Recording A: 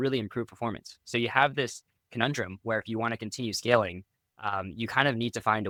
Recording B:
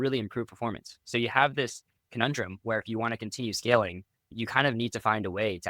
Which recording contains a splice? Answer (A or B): B